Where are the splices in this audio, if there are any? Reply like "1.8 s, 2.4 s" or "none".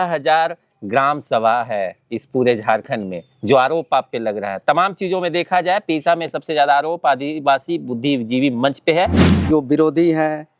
9.3 s